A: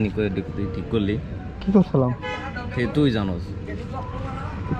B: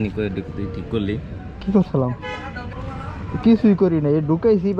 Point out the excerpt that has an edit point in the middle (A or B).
B